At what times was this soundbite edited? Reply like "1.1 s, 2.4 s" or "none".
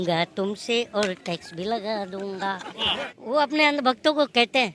2.8 s